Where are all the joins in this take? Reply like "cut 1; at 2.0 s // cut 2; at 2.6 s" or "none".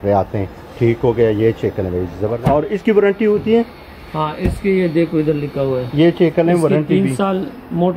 cut 1; at 2.2 s